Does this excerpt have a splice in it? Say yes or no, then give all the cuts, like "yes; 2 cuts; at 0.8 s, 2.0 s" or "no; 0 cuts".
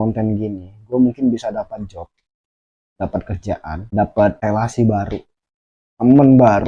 yes; 2 cuts; at 3.8 s, 4.4 s